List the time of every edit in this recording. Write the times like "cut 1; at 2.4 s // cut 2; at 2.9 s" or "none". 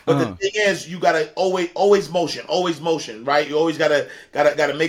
none